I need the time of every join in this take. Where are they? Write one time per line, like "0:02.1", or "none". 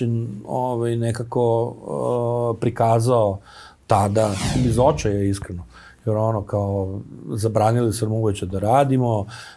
0:04.5